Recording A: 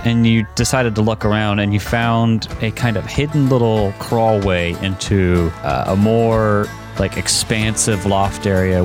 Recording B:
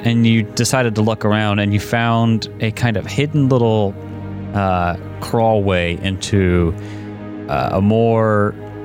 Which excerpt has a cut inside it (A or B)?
A